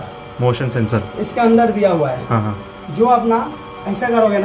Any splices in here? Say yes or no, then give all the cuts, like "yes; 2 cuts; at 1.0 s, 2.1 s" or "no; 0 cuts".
no; 0 cuts